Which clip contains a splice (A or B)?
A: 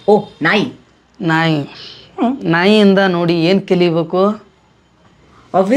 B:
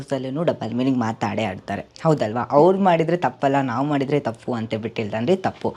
B